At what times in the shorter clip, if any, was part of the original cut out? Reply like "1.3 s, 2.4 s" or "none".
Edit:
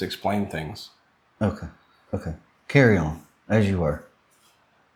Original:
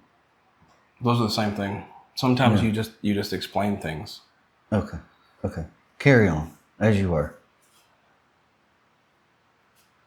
none